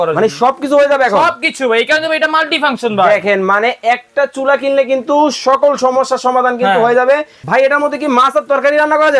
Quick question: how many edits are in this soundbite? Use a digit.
1